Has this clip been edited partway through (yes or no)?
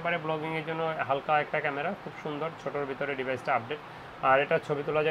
no